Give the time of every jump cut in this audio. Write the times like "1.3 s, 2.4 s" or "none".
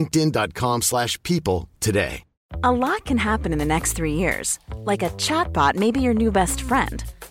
2.5 s